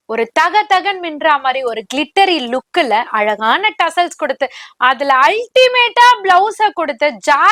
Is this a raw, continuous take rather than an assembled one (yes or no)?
yes